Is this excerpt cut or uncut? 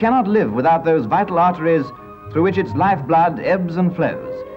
cut